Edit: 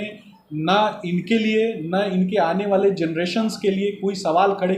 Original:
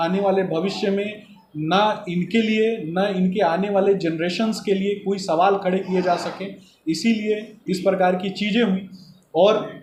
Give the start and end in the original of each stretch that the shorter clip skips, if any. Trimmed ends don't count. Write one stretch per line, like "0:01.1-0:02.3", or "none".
none